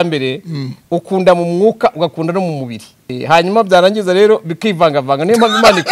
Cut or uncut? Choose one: cut